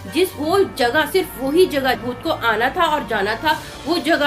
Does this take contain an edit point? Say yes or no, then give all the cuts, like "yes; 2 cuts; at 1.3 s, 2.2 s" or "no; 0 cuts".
yes; 1 cut; at 2.0 s